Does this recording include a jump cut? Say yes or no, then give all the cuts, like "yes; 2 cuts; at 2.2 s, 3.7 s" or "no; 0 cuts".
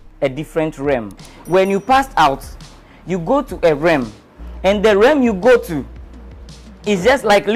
yes; 1 cut; at 1.1 s